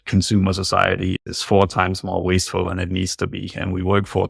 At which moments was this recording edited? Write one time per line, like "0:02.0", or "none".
none